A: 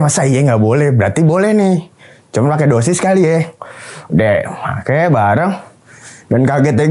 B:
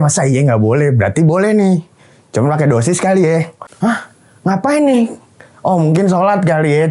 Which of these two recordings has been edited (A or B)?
B